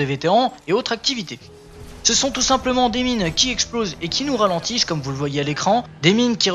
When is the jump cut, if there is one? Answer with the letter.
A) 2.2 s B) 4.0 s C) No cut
C